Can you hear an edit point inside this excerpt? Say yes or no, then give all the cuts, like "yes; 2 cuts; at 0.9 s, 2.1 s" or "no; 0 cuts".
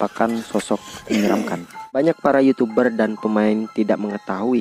yes; 1 cut; at 1.8 s